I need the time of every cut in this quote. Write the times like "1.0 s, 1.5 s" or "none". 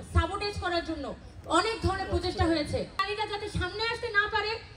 3.0 s